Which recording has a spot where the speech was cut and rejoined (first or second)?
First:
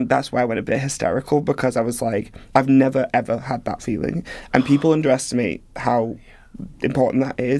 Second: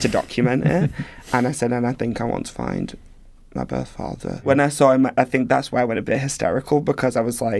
second